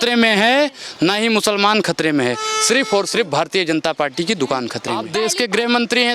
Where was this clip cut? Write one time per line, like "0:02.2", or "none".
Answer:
0:05.0